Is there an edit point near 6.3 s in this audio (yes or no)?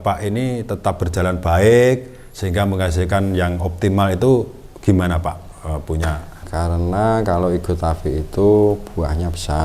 yes